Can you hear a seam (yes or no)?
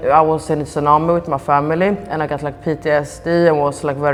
no